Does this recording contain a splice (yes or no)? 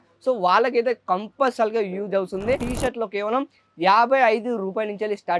yes